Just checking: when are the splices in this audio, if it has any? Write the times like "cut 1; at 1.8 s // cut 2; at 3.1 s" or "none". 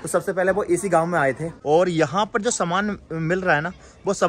cut 1; at 1.5 s